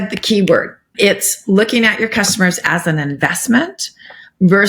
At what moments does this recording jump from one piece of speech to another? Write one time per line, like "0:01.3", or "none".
0:00.9